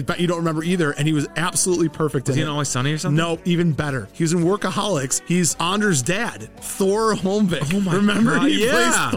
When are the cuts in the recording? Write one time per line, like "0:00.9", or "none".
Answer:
none